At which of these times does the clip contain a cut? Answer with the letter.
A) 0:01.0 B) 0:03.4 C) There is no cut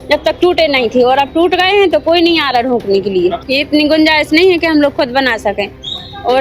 B